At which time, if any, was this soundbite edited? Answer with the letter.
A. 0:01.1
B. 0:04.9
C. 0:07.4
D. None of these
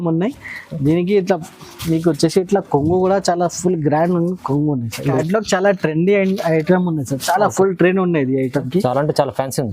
B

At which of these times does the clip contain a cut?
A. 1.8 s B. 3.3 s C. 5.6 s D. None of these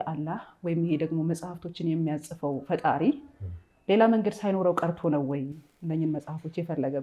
D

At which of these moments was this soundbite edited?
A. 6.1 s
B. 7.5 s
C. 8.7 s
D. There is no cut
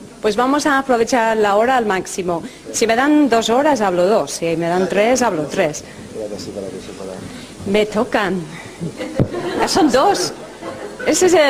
A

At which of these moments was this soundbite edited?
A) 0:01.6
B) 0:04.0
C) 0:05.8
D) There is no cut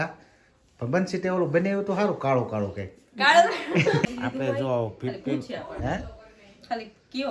B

